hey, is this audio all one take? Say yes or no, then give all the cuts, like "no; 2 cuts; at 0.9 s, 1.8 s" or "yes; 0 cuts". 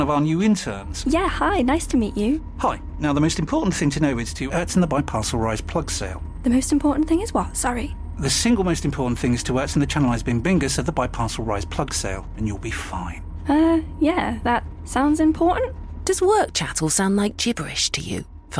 yes; 0 cuts